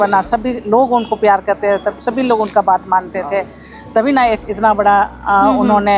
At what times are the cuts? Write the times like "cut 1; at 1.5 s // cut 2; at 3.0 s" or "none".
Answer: none